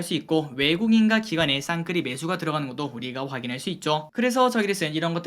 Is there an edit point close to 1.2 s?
no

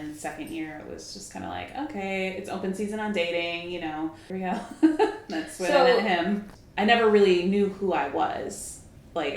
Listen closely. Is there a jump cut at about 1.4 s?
no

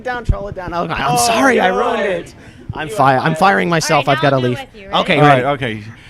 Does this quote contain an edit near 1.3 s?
no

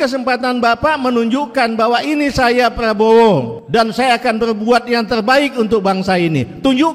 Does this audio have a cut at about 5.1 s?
no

